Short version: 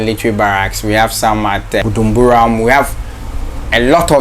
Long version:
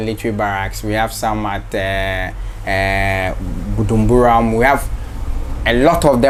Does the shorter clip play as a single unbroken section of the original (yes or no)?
no